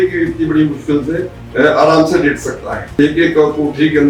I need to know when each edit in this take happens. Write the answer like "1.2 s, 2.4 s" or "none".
1.4 s, 3.0 s

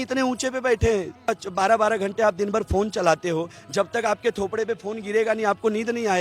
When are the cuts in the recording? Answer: 1.3 s

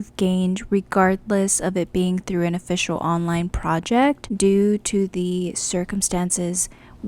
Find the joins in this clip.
4.3 s

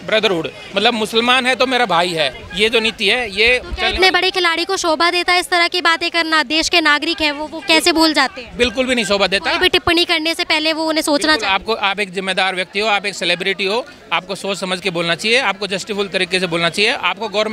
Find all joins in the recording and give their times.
none

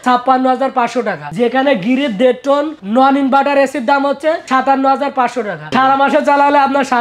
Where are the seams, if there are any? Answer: 5.7 s

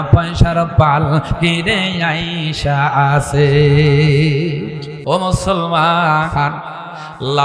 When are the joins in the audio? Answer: 4.9 s

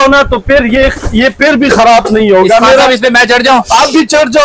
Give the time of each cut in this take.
none

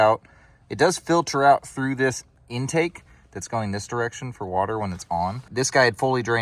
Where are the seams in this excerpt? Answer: 2.3 s, 5.5 s

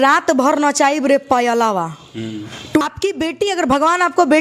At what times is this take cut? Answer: 2.8 s

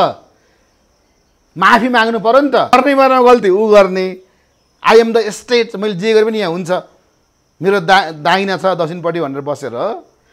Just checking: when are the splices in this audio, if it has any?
2.7 s

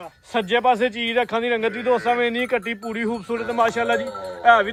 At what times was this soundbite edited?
none

